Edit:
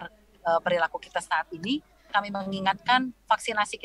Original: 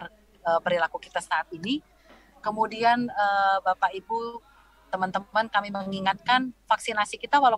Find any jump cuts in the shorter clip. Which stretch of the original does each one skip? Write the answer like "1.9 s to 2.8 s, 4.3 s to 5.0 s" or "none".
2.1 s to 5.5 s